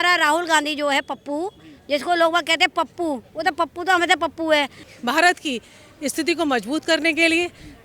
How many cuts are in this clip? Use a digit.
1